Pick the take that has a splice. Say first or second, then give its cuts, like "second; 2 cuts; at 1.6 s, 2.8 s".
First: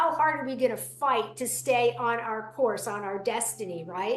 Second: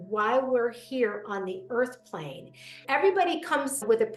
second; 1 cut; at 2.9 s